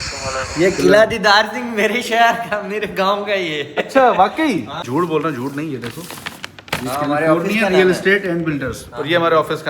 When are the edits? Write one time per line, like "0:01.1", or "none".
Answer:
0:04.8